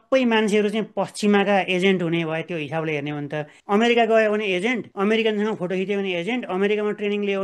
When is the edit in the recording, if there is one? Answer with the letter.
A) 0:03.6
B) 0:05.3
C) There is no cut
A